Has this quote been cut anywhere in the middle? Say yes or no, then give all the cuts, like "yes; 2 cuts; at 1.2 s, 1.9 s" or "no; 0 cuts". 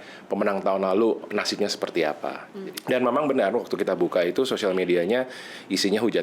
yes; 1 cut; at 2.4 s